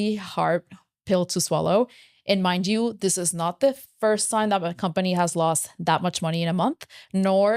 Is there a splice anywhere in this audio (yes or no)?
no